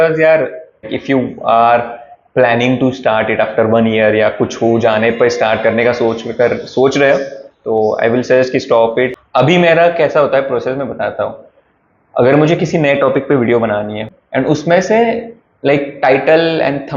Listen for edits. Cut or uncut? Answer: cut